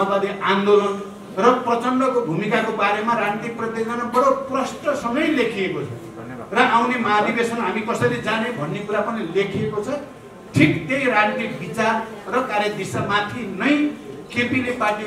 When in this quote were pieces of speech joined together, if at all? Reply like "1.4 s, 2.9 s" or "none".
none